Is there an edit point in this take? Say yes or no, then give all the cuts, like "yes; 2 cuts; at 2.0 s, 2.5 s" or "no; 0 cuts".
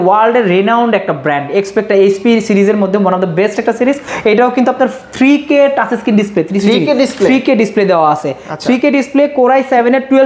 no; 0 cuts